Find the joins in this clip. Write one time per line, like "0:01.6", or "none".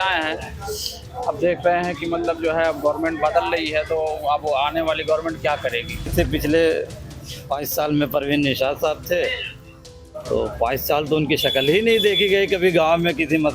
0:06.1